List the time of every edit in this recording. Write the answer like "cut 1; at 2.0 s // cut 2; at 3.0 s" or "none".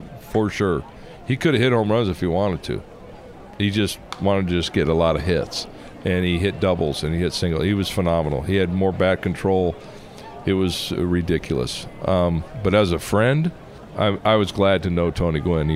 cut 1; at 13.8 s